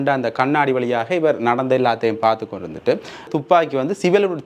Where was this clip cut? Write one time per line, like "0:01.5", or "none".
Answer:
0:03.3